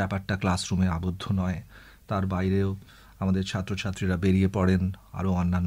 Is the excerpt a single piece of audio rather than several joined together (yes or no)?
yes